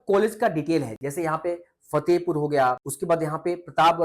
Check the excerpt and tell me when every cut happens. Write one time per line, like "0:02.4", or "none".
0:02.9

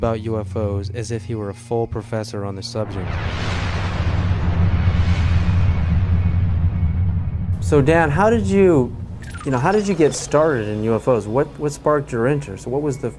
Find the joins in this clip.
none

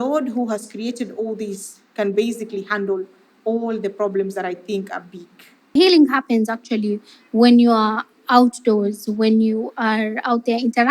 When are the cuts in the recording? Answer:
0:05.7

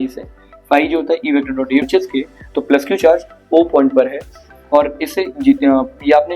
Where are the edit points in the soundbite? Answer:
0:01.8

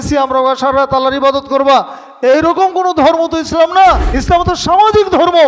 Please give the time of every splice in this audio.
0:04.1

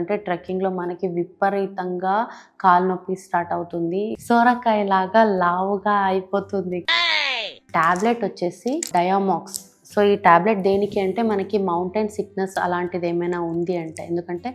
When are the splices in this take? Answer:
0:04.2
0:07.7
0:08.9

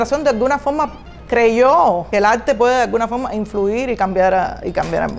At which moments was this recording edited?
0:02.1

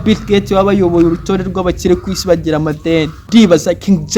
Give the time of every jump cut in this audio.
0:03.2

